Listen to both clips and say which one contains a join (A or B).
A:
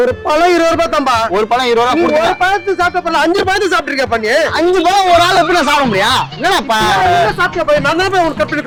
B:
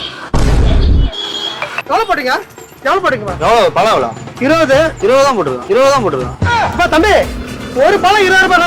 B